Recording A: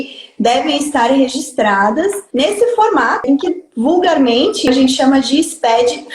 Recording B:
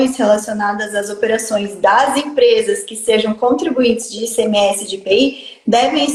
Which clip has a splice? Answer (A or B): A